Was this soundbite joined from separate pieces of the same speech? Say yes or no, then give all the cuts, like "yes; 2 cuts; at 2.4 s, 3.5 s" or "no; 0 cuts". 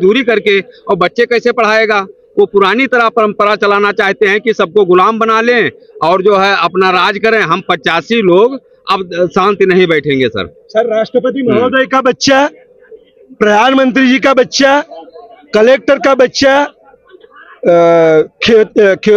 no; 0 cuts